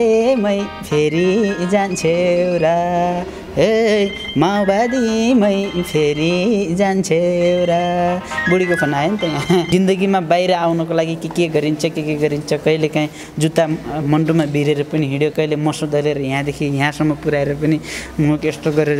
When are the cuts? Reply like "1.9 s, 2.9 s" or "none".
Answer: 9.7 s